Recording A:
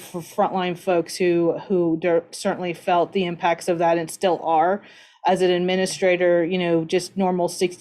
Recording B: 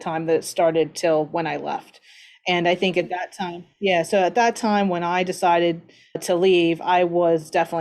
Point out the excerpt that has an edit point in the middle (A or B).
B